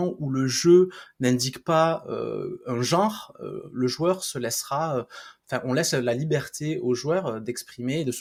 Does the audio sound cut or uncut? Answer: uncut